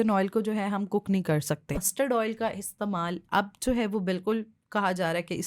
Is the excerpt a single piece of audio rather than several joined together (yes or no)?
no